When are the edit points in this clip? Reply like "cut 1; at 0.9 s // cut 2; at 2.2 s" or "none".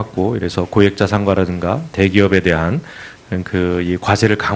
cut 1; at 2.5 s